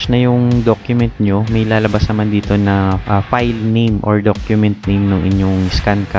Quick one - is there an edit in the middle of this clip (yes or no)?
yes